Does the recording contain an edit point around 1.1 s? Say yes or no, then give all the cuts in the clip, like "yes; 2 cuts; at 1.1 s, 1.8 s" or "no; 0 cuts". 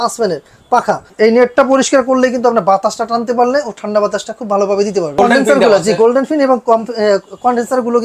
yes; 2 cuts; at 1.1 s, 5.2 s